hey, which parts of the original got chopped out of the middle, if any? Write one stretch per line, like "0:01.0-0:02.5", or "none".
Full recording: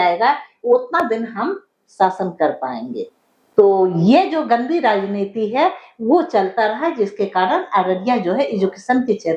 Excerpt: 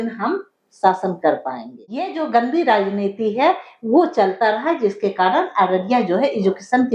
0:03.3-0:04.3